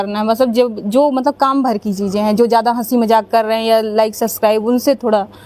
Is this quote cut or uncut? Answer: uncut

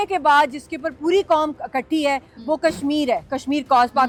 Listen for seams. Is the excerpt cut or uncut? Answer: uncut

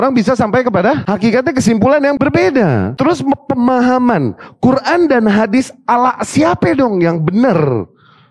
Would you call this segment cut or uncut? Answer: cut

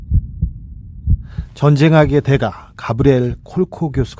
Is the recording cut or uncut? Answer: cut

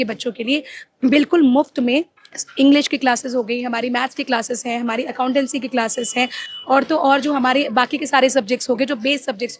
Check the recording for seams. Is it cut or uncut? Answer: uncut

